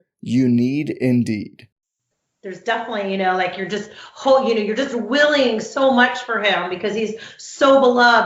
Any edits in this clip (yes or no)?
yes